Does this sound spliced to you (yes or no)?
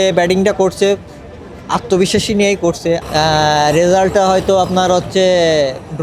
yes